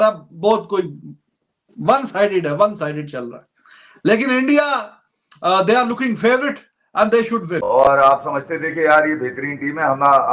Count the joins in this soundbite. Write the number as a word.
one